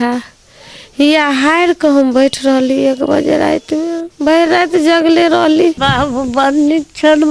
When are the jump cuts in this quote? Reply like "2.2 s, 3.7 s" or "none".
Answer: 5.8 s